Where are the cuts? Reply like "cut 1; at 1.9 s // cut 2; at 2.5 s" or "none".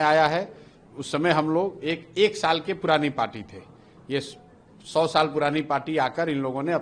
none

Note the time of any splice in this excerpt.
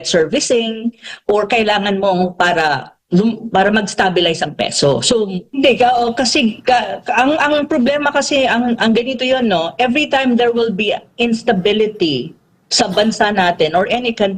cut 1; at 5.4 s

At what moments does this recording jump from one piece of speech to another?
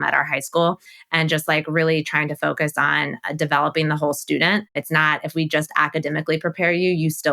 cut 1; at 0.9 s // cut 2; at 4.8 s

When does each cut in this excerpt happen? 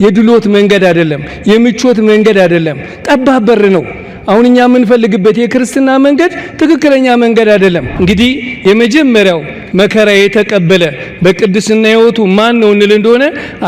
cut 1; at 7.9 s

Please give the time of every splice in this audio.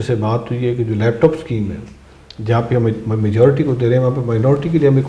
none

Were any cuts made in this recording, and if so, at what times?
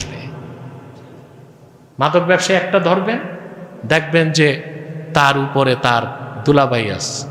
none

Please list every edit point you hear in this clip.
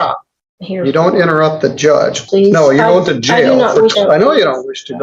cut 1; at 2.2 s // cut 2; at 3.9 s

